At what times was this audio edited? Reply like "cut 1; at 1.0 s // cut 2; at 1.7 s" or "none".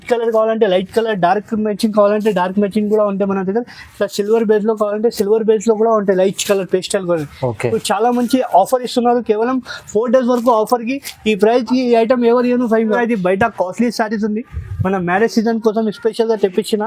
cut 1; at 13.0 s